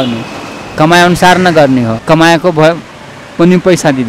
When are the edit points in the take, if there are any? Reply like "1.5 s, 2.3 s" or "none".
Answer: 1.9 s